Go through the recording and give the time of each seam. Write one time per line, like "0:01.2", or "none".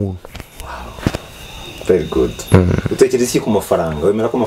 none